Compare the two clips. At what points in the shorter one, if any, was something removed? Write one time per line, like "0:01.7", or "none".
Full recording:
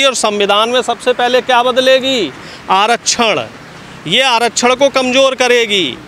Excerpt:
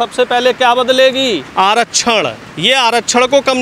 0:01.5
0:02.5

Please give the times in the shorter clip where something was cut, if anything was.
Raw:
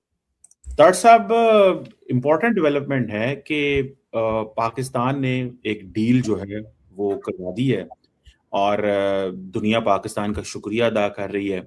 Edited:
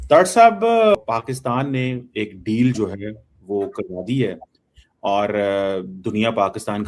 0:01.0

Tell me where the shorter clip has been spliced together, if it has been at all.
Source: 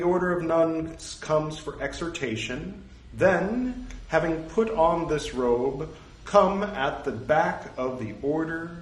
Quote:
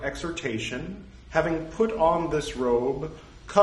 0:01.1

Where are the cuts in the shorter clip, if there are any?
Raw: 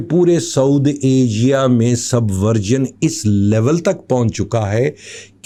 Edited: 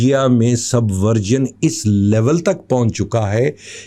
none

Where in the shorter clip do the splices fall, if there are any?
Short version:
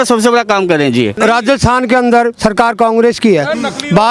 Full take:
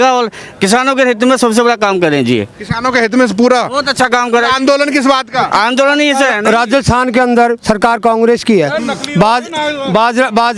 0:01.1

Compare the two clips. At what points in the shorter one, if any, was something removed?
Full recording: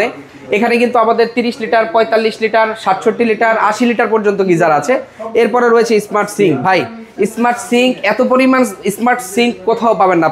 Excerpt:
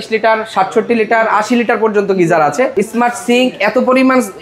0:02.7

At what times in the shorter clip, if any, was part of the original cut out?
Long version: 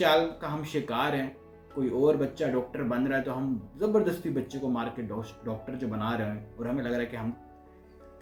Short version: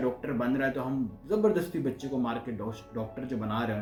none

